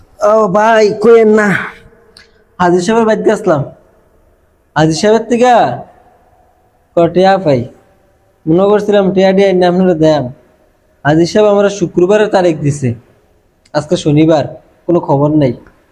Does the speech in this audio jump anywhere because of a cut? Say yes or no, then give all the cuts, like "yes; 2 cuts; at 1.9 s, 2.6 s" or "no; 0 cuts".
no; 0 cuts